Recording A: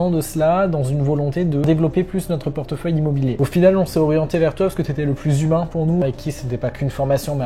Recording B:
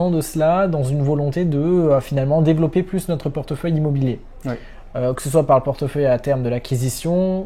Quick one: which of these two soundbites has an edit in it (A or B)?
A